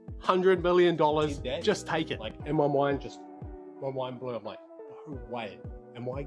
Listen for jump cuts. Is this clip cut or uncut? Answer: cut